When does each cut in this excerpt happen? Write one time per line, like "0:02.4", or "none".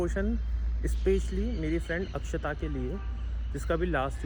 none